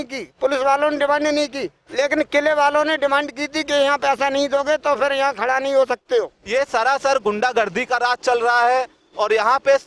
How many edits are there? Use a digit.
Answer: 1